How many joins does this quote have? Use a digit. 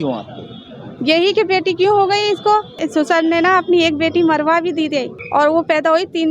2